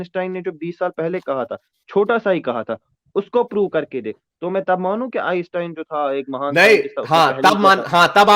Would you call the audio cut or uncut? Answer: uncut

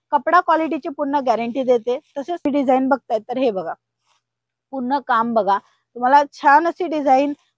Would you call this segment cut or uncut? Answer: cut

